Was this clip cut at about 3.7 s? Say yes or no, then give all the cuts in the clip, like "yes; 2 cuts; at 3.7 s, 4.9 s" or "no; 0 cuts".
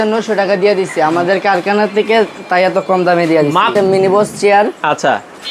yes; 1 cut; at 3.7 s